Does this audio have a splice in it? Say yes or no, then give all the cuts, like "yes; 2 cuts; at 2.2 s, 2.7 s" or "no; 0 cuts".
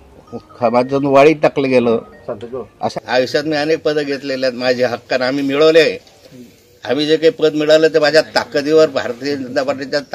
yes; 1 cut; at 2.8 s